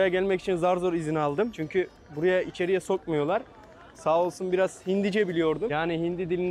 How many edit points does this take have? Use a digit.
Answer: 2